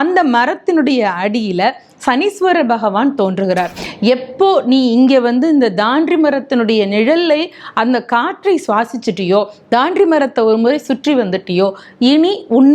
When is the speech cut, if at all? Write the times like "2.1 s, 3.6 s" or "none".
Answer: 3.7 s